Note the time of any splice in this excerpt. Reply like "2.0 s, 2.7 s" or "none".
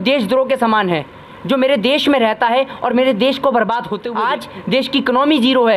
4.0 s